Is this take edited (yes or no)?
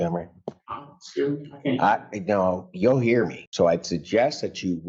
yes